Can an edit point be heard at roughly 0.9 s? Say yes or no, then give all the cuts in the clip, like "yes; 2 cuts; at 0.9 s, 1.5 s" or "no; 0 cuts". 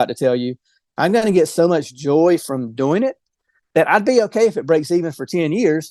no; 0 cuts